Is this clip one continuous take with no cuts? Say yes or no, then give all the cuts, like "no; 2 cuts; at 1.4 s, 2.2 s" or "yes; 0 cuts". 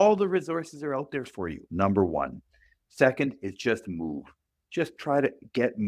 no; 1 cut; at 1.6 s